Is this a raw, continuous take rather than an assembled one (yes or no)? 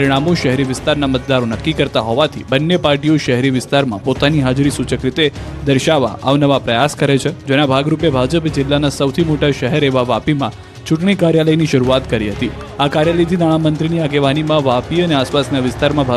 no